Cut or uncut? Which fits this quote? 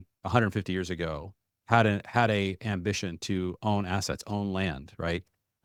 uncut